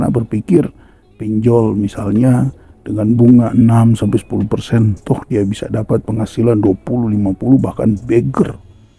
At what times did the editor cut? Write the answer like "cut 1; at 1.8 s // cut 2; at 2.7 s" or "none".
none